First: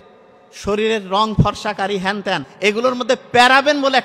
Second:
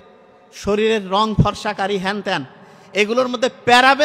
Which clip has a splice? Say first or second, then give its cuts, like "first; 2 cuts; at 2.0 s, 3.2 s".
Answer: first; 1 cut; at 2.5 s